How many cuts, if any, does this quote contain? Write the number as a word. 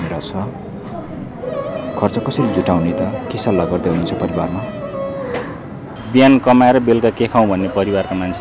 one